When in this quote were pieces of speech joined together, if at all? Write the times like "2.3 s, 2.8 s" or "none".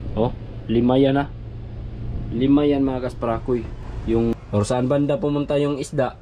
4.3 s